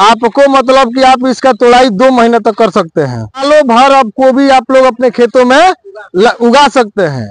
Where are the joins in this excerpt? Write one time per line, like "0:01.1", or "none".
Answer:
0:03.4